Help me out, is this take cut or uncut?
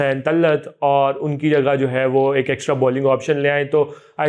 uncut